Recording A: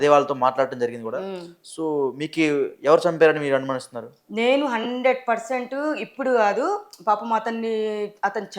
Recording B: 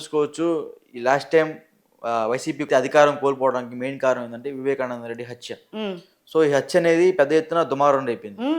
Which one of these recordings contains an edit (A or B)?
B